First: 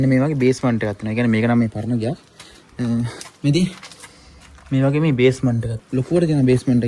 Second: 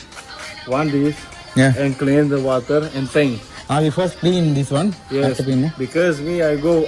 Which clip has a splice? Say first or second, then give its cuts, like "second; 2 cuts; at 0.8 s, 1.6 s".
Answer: first; 1 cut; at 5.7 s